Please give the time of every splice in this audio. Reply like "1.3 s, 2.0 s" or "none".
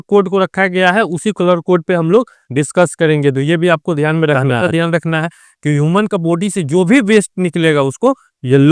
4.6 s